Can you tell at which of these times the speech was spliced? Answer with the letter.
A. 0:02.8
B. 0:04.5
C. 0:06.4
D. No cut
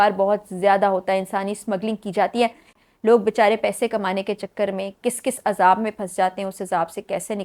A